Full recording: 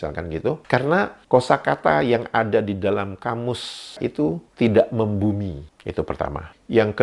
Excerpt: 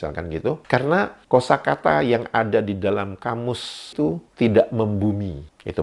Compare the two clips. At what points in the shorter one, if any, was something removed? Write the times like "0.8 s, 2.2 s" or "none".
3.9 s